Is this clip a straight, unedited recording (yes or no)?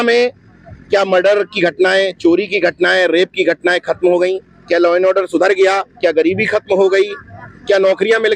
yes